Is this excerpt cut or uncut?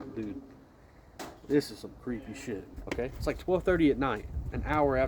cut